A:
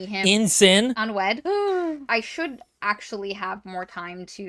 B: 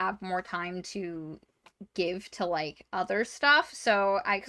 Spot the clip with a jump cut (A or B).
A